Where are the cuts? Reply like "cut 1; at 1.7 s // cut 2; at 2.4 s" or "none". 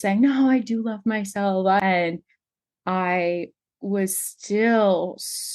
cut 1; at 1.8 s

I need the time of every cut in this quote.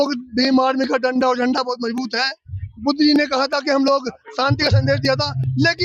none

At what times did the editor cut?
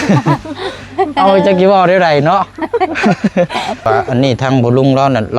cut 1; at 3.9 s

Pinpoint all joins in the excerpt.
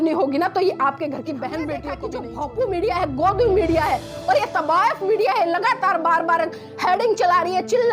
cut 1; at 2.0 s

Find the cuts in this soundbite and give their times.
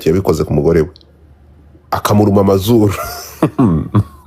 cut 1; at 2.0 s

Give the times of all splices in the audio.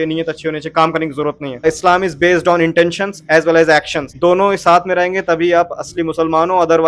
none

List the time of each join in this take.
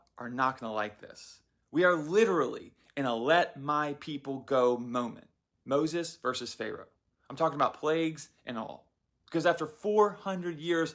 none

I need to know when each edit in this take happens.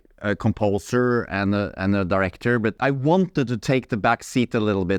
cut 1; at 2.8 s

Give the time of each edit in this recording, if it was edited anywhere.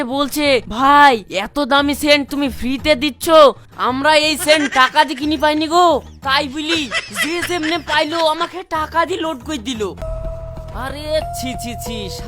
cut 1; at 10.0 s

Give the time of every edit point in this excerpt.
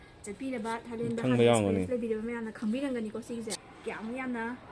cut 1; at 3.5 s

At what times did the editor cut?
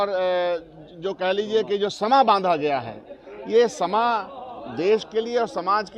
none

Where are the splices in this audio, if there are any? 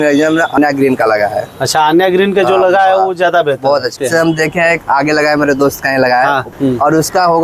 cut 1; at 3.9 s // cut 2; at 6.5 s

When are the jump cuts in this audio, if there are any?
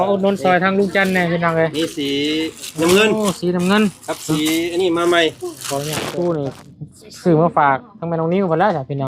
cut 1; at 5.9 s

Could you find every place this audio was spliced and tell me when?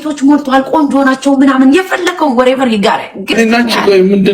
cut 1; at 3.3 s

